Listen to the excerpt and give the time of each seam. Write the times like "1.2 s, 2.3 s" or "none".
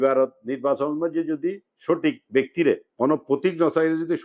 2.9 s

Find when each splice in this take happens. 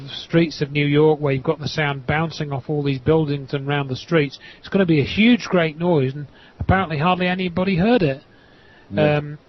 5.6 s

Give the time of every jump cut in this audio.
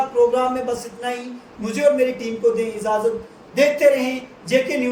none

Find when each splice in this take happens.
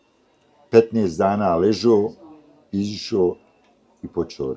none

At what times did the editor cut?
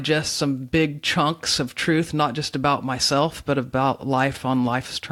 none

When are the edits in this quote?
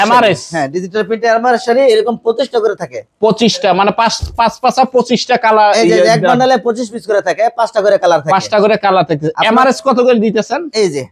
none

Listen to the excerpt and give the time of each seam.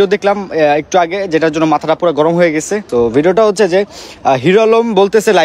2.8 s

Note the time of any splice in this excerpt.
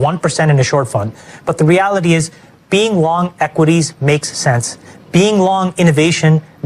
none

